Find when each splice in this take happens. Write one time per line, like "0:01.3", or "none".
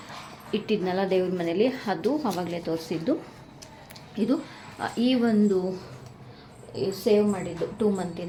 none